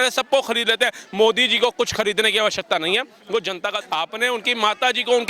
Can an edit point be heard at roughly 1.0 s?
no; 1 cut; at 3.8 s

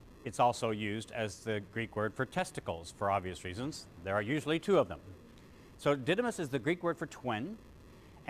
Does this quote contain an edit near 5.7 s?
no; 1 cut; at 4.0 s

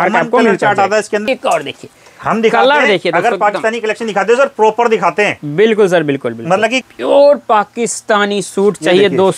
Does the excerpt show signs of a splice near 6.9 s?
yes; 2 cuts; at 1.2 s, 6.9 s

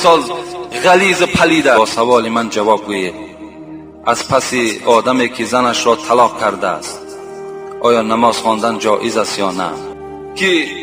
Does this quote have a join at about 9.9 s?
yes; 2 cuts; at 1.8 s, 9.9 s

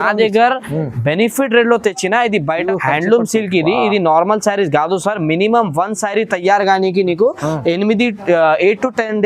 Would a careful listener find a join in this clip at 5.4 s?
no; 1 cut; at 2.6 s

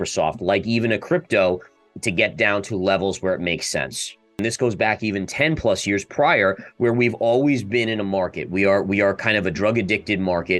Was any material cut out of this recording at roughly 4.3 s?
yes; 1 cut; at 4.3 s

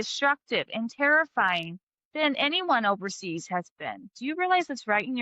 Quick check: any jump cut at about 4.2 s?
yes; 1 cut; at 4.2 s

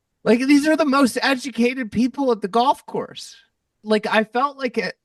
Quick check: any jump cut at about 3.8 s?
yes; 1 cut; at 3.8 s

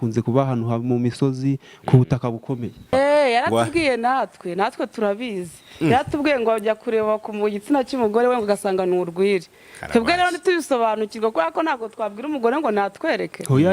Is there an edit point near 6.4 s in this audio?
no; 1 cut; at 2.9 s

